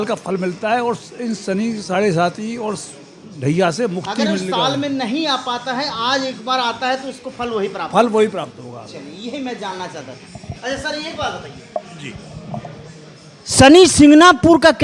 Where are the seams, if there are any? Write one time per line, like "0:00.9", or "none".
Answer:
none